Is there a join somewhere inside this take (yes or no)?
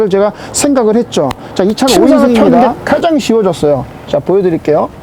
yes